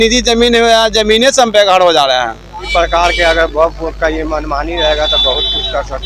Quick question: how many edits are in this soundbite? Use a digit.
1